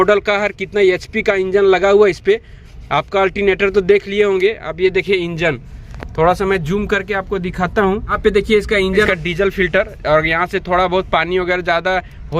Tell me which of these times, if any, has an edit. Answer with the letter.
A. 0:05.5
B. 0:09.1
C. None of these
B